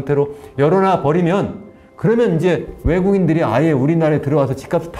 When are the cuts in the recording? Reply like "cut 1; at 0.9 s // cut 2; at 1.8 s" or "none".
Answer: none